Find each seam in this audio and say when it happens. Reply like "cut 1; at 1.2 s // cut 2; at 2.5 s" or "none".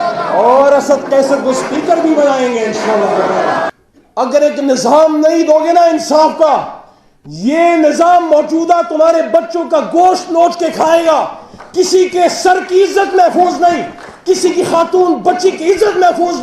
cut 1; at 3.7 s